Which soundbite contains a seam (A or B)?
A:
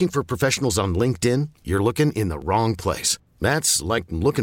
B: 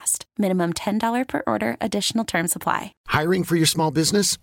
B